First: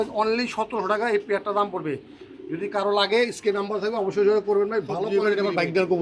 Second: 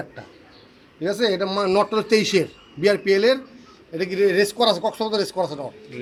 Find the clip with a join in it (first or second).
first